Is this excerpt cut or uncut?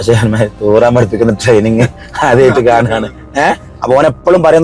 cut